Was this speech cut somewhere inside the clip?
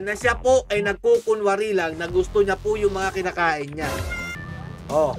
yes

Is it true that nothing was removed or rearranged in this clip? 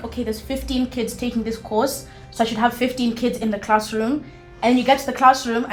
yes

